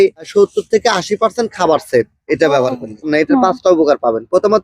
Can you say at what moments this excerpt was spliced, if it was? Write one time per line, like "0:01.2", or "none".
0:03.0